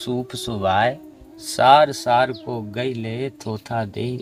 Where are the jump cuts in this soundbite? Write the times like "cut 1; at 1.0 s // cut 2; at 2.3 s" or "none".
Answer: none